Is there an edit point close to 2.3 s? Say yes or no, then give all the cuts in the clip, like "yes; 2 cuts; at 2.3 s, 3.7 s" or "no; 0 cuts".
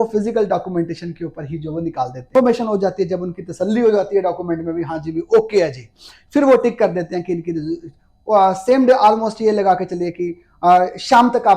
yes; 1 cut; at 2.3 s